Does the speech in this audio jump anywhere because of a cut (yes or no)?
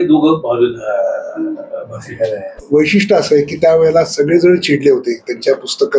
yes